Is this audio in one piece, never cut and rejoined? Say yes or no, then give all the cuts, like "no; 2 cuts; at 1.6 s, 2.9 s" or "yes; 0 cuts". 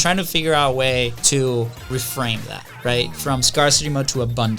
no; 2 cuts; at 1.2 s, 1.9 s